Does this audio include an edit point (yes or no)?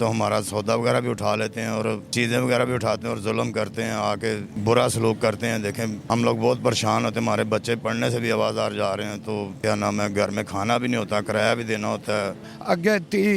yes